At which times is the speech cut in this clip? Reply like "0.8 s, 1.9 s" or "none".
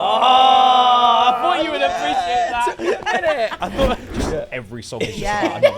4.1 s